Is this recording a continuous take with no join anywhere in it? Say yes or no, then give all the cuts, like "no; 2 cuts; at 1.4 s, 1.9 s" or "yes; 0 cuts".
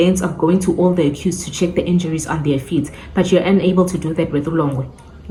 yes; 0 cuts